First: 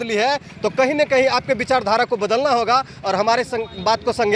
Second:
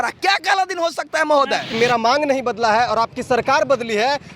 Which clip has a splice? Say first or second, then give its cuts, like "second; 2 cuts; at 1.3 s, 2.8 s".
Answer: second; 1 cut; at 1.8 s